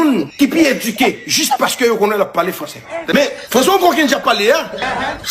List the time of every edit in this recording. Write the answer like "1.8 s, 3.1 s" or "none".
3.0 s